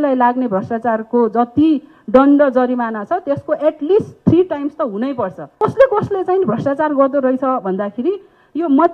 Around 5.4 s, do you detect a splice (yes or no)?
yes